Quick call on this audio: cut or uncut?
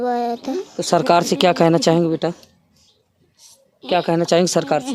uncut